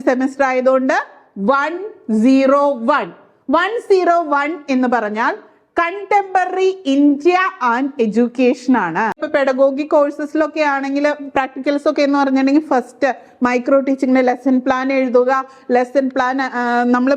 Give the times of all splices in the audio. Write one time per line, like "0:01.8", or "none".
0:09.3

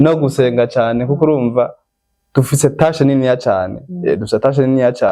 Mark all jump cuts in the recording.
none

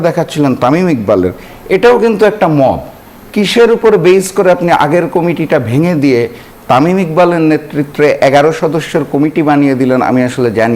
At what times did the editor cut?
none

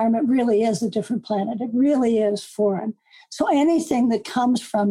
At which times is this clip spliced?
none

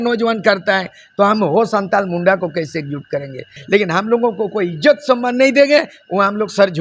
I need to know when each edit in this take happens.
0:03.6

